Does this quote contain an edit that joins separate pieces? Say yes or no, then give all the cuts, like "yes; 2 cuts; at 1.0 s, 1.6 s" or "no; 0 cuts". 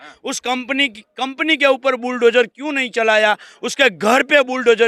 no; 0 cuts